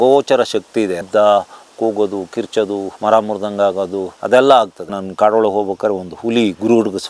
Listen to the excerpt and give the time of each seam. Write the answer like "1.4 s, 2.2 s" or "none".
1.0 s, 2.9 s, 4.1 s, 4.9 s